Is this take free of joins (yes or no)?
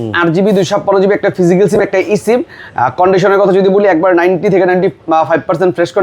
yes